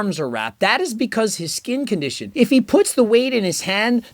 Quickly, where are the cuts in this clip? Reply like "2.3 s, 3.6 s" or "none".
2.2 s